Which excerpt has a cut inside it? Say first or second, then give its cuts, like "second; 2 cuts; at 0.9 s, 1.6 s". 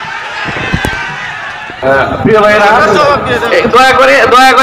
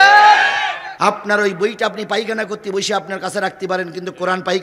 first; 1 cut; at 1.8 s